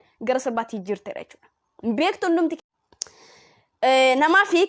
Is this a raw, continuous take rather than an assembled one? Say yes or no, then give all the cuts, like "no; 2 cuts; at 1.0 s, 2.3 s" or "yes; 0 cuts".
no; 1 cut; at 2.6 s